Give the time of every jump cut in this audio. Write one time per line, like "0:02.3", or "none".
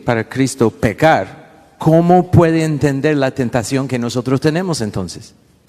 none